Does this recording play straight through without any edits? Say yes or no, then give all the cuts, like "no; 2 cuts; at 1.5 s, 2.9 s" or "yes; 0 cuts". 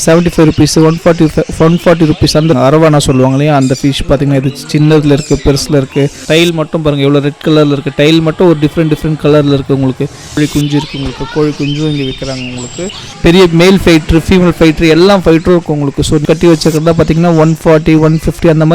no; 5 cuts; at 2.5 s, 6.2 s, 10.3 s, 13.0 s, 16.2 s